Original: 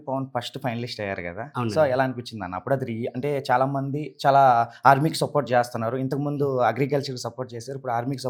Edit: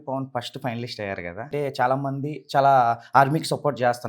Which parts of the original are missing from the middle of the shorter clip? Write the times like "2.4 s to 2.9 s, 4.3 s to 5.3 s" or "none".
1.5 s to 3.2 s